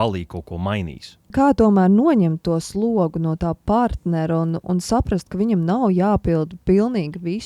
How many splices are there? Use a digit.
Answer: 1